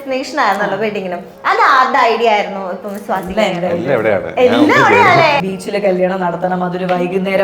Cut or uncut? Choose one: cut